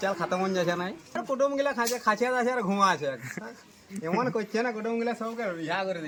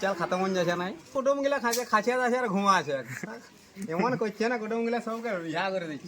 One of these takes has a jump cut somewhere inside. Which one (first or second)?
second